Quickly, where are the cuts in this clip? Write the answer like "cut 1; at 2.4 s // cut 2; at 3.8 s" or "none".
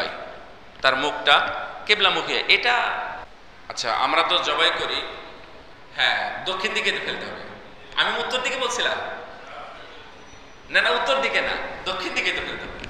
cut 1; at 3.3 s